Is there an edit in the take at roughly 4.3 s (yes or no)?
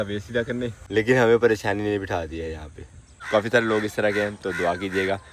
no